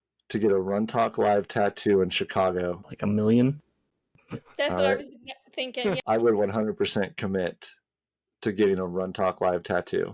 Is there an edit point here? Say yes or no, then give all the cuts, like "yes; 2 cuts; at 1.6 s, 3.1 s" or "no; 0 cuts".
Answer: yes; 2 cuts; at 2.9 s, 6.0 s